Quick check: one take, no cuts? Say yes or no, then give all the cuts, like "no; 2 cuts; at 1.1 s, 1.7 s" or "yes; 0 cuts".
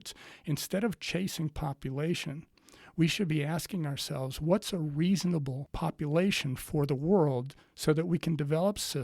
no; 1 cut; at 5.6 s